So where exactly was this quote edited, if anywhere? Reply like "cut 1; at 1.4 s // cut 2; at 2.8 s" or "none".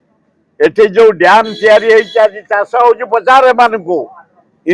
none